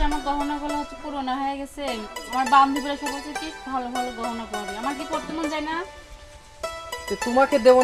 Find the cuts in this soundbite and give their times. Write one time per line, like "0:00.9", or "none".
none

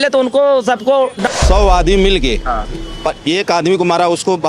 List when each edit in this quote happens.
0:01.2

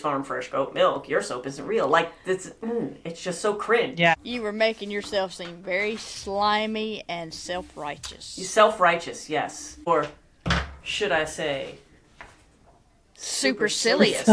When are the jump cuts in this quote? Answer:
0:04.1
0:09.9

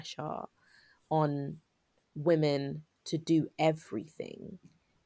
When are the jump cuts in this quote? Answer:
none

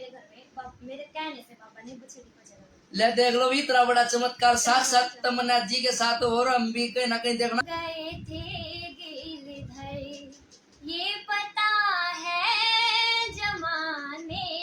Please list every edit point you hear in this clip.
0:07.6

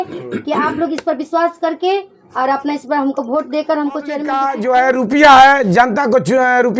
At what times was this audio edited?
0:04.5

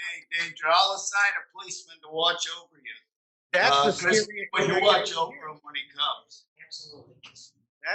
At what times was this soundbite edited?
none

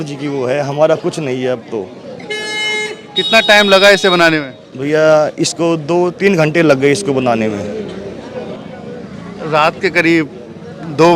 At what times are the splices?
none

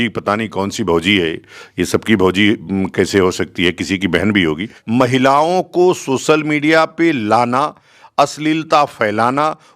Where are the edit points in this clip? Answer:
0:04.7

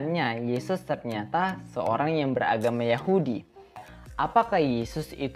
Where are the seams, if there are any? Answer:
0:03.9

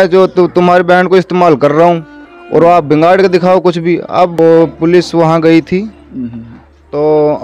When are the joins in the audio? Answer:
0:04.3

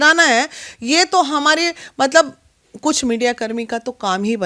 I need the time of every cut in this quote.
none

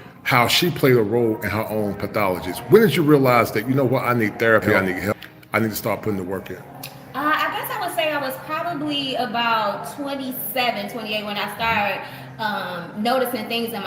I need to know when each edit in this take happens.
0:05.1

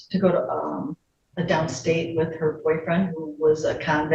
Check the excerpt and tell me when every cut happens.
none

